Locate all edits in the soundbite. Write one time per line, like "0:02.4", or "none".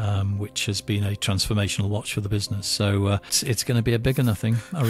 0:03.4